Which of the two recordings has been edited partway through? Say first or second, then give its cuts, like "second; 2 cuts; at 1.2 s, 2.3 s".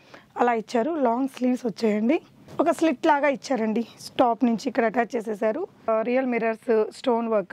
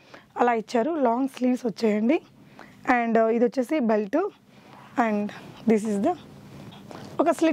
first; 2 cuts; at 2.4 s, 5.9 s